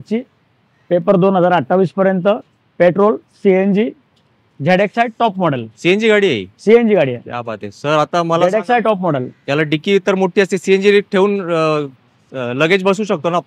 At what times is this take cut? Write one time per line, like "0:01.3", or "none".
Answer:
none